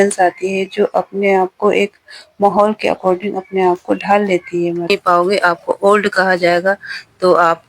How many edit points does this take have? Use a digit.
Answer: 1